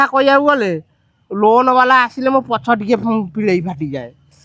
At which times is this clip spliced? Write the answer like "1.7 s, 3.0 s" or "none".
none